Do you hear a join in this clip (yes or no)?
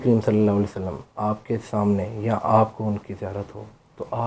no